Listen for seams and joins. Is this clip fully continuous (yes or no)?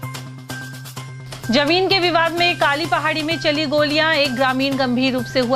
no